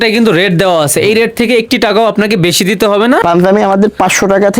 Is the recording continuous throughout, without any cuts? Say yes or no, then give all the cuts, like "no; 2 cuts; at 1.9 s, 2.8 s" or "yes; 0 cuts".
no; 1 cut; at 3.2 s